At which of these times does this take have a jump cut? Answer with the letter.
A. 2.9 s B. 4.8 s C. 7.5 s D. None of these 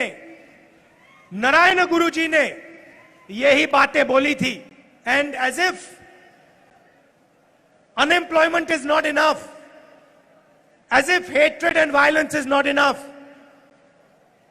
B